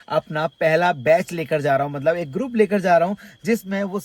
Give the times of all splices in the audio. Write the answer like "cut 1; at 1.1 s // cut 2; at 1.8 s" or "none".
none